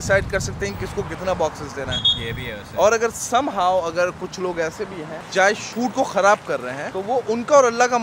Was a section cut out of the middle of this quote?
no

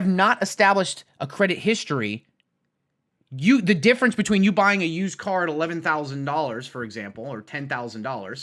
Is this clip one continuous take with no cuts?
yes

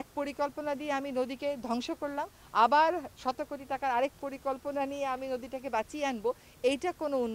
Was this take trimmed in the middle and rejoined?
no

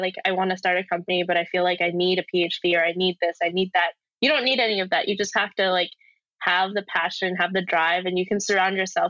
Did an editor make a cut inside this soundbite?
no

